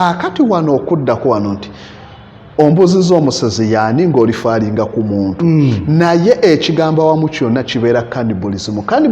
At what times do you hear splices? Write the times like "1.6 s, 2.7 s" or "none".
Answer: none